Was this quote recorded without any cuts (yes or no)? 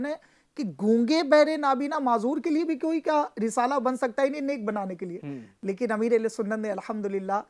yes